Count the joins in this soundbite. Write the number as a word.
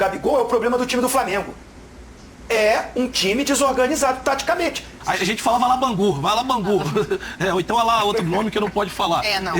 one